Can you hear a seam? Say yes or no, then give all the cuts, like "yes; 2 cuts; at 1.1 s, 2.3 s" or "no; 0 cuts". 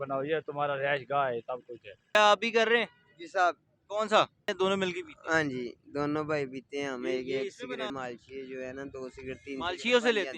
yes; 3 cuts; at 2.1 s, 4.5 s, 7.9 s